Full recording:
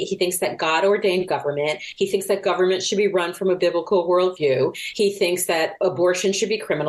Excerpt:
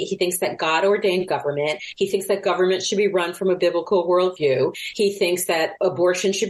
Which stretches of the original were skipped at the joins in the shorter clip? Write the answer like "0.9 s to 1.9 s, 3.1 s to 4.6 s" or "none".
none